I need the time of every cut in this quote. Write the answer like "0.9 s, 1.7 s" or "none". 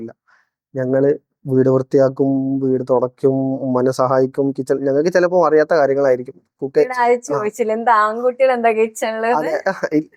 none